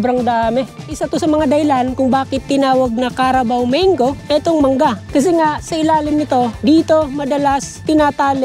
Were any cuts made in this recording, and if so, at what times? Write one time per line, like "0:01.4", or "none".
0:00.9
0:04.2
0:05.0
0:06.5